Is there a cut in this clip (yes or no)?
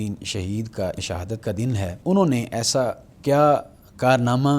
yes